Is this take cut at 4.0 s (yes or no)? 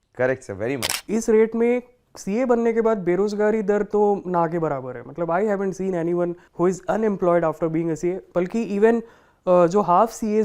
no